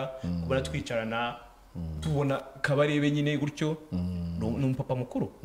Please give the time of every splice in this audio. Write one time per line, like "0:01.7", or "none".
none